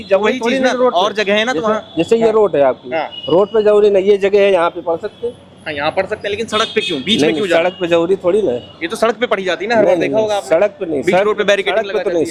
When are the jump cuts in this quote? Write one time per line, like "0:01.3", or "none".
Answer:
none